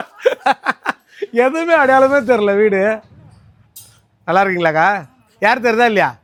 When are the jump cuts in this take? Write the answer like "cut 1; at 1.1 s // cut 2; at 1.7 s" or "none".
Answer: none